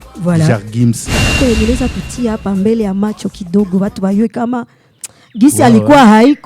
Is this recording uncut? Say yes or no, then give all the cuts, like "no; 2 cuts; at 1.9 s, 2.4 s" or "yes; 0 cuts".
no; 1 cut; at 1.3 s